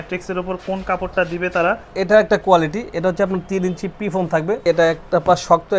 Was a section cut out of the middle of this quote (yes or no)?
yes